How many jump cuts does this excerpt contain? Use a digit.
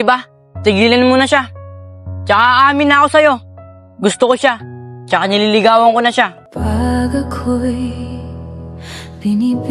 1